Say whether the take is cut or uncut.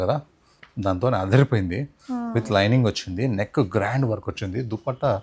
uncut